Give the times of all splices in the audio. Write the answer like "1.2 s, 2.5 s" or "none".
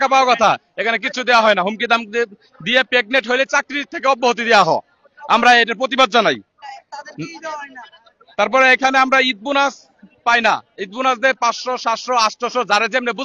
none

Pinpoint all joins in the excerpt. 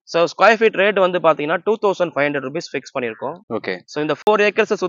none

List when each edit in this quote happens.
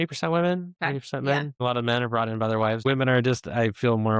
1.5 s, 2.8 s

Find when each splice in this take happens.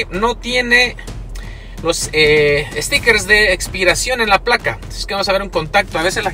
none

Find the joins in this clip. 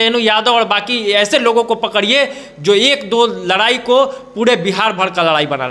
none

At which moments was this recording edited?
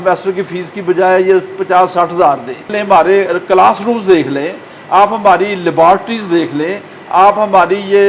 2.7 s

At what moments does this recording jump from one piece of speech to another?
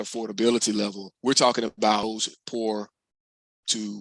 1.1 s, 2.0 s

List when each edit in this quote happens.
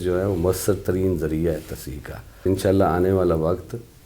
2.5 s

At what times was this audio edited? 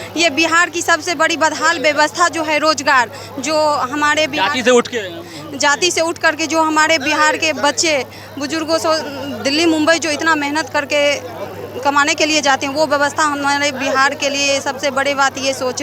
none

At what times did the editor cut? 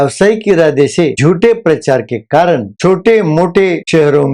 1.1 s, 2.7 s

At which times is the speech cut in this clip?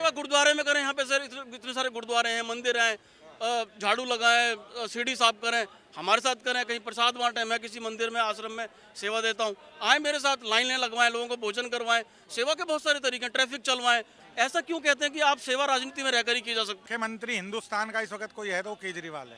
14.2 s, 16.8 s

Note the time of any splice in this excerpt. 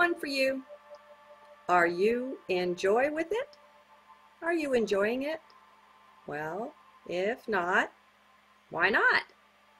4.8 s

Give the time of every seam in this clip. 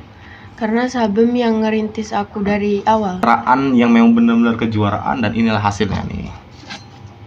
3.2 s

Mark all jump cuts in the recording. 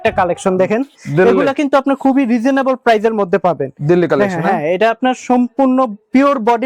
none

